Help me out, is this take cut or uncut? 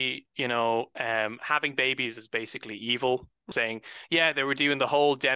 cut